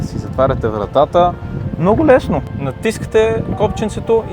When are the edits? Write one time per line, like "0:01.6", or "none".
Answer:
none